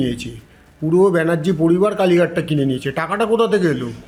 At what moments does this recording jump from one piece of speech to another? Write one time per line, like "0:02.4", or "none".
none